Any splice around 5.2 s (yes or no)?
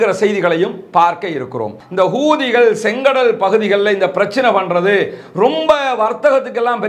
no